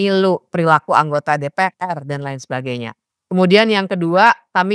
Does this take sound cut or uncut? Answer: uncut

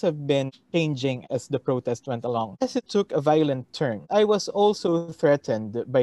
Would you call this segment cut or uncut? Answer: cut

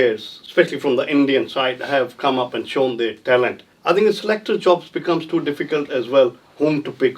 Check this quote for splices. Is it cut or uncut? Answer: cut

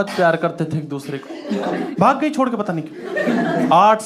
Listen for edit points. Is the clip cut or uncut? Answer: cut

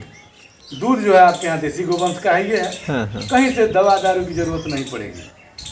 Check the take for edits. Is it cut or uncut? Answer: uncut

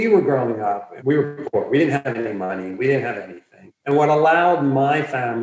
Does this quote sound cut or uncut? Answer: cut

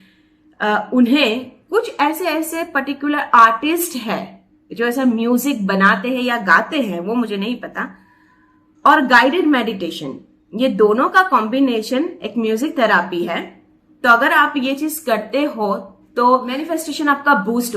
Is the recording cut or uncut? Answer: cut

